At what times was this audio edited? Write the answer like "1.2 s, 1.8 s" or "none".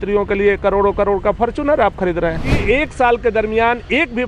2.5 s